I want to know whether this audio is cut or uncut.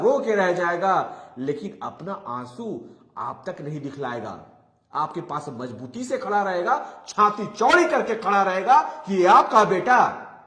uncut